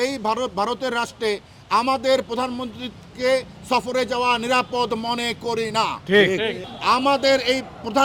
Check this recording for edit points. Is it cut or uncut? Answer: cut